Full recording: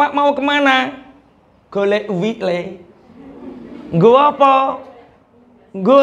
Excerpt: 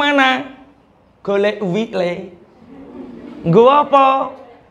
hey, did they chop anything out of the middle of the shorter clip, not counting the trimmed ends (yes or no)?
no